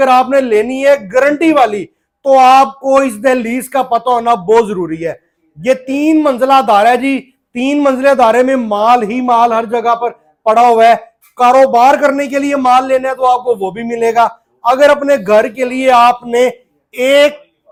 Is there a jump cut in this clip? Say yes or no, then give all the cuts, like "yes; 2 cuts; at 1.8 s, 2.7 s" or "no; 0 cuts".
no; 0 cuts